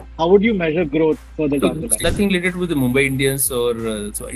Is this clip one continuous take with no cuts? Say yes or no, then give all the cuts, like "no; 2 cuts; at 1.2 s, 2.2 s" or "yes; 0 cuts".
no; 1 cut; at 1.3 s